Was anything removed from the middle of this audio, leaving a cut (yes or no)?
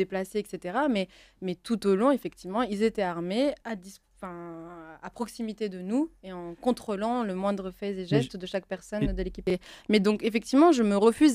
yes